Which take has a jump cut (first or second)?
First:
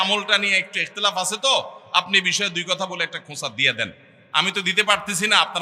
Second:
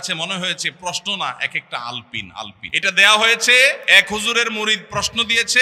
second